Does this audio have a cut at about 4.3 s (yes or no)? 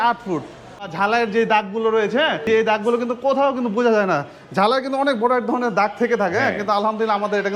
no